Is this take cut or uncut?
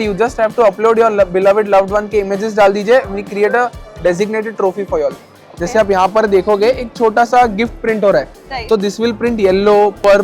cut